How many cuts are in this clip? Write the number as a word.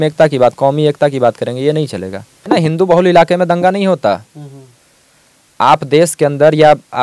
one